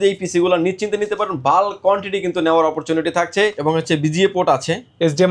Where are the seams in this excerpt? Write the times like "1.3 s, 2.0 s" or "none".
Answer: 3.6 s